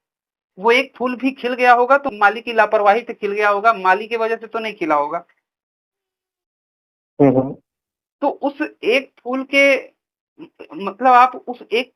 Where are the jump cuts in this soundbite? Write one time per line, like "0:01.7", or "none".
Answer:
0:02.1